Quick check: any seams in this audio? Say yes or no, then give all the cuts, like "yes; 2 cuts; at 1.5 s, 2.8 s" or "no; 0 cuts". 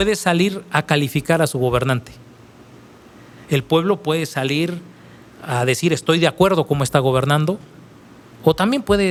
no; 0 cuts